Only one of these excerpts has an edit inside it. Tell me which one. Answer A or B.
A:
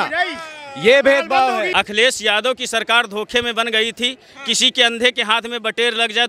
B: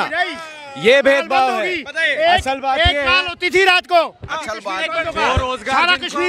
A